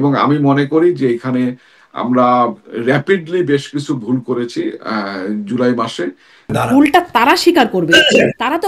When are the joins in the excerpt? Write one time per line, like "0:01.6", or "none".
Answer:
0:06.5